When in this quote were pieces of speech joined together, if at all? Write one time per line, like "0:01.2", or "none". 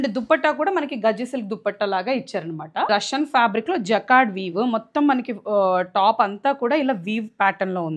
0:02.9